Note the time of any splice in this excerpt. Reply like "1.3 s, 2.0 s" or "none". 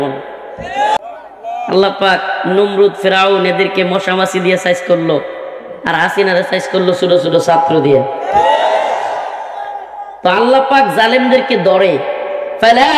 1.0 s